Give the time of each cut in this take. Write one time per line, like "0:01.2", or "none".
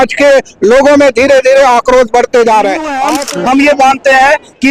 0:03.0